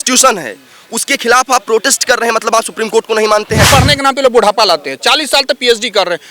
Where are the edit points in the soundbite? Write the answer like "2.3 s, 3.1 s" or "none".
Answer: 3.7 s